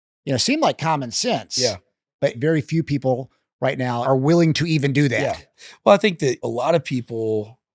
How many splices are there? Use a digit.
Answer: 3